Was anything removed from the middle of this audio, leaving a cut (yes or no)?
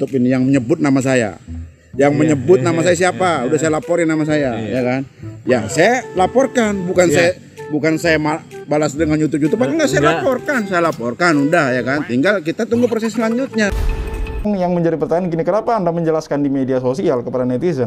yes